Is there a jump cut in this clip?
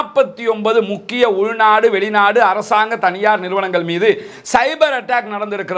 no; 0 cuts

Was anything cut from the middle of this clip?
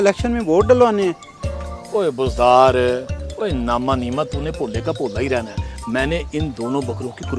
no; 0 cuts

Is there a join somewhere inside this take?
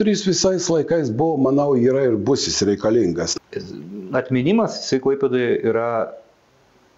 yes; 1 cut; at 3.3 s

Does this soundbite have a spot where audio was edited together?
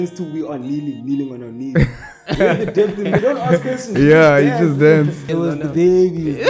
yes; 2 cuts; at 3.2 s, 5.2 s

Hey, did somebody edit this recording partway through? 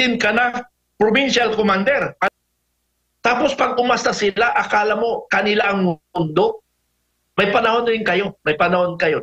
yes; 1 cut; at 2.3 s

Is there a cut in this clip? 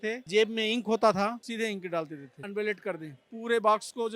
yes; 1 cut; at 1.4 s

